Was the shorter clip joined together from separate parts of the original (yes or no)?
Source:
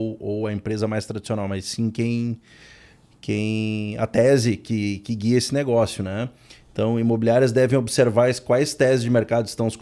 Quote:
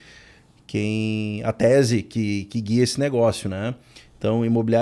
no